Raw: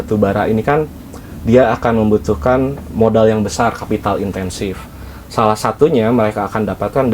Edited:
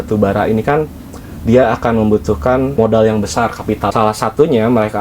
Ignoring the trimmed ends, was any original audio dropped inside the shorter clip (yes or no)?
yes